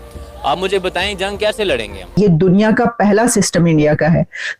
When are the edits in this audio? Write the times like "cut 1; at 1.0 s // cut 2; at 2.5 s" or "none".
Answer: cut 1; at 2.2 s